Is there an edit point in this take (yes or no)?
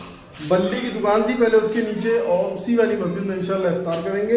no